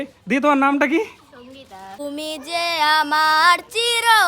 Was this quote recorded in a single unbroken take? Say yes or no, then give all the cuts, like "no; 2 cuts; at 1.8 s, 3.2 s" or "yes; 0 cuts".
no; 1 cut; at 2.0 s